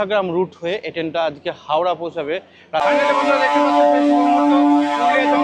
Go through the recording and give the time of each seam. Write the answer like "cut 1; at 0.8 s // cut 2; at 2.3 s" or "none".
cut 1; at 2.8 s